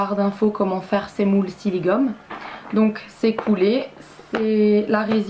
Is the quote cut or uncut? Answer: uncut